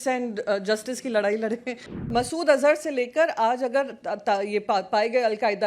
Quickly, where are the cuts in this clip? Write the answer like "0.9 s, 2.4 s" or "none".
2.0 s